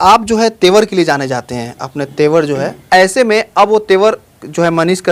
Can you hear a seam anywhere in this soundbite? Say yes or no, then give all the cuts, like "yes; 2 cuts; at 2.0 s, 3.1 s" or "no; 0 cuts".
yes; 1 cut; at 2.8 s